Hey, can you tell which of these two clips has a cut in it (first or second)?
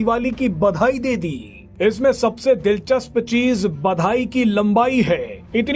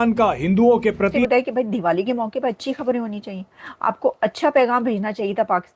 second